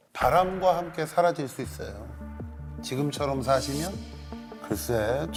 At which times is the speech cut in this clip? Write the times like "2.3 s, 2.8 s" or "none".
none